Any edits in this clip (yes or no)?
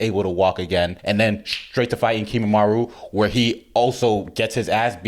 yes